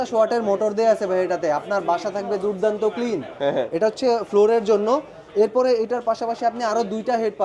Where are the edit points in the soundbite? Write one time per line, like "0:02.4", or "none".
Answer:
none